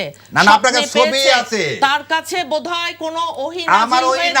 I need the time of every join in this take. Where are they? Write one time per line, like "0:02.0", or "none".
none